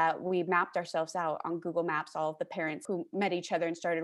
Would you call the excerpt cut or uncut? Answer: uncut